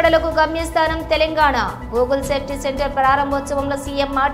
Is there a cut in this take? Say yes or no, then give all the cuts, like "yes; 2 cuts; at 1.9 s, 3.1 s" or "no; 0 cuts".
no; 0 cuts